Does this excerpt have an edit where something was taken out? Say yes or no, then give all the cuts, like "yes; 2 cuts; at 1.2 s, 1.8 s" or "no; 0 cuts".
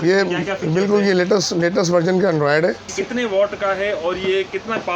yes; 1 cut; at 2.9 s